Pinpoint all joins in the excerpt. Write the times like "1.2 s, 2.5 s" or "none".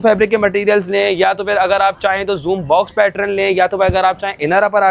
none